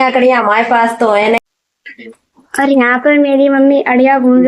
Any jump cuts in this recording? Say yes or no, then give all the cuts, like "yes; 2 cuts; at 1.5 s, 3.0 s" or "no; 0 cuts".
yes; 1 cut; at 1.4 s